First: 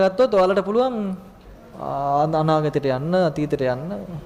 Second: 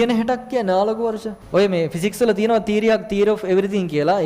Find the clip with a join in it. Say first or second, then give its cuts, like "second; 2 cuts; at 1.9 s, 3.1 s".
second; 1 cut; at 1.3 s